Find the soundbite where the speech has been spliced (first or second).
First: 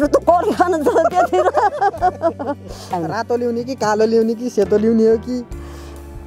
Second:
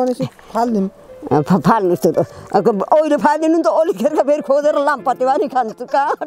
first